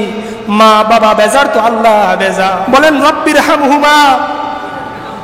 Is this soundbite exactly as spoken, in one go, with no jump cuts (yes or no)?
no